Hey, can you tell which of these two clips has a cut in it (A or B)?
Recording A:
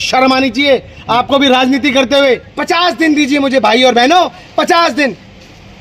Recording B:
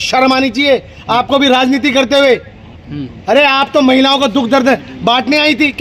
A